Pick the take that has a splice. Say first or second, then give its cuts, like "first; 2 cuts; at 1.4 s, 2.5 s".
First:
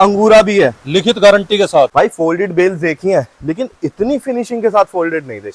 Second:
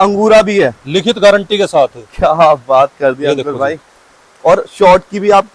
first; 1 cut; at 1.9 s